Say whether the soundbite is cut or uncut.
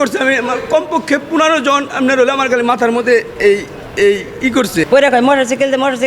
cut